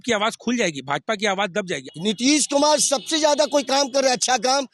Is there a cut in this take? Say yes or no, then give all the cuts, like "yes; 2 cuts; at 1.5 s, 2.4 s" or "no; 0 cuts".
yes; 1 cut; at 1.8 s